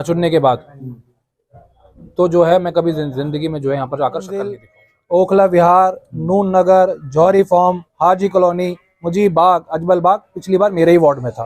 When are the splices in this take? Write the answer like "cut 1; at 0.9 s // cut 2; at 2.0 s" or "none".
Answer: cut 1; at 4.5 s